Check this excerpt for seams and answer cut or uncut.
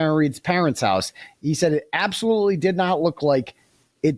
uncut